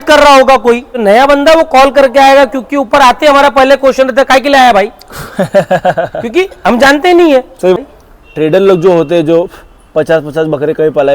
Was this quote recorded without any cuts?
no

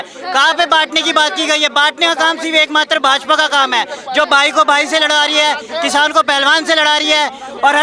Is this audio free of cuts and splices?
yes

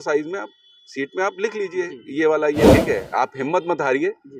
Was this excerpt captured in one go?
no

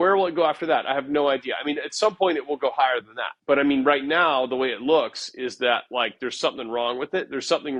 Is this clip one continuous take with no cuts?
yes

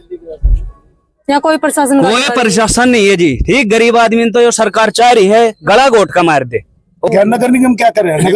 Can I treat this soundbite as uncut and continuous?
no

